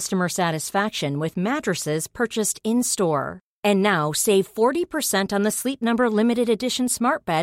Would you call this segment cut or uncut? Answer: uncut